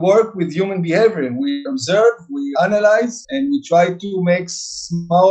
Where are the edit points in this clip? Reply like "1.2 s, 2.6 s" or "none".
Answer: 1.6 s, 2.5 s